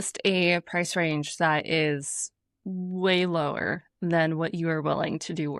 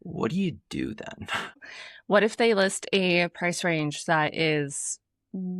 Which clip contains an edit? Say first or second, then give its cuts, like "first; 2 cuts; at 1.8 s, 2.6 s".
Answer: second; 1 cut; at 1.7 s